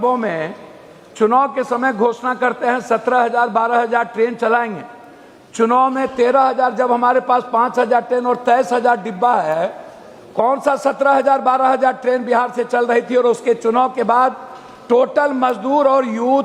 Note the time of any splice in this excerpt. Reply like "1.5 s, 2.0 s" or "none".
none